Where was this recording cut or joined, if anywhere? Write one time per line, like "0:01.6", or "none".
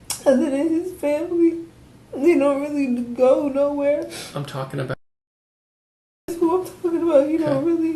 none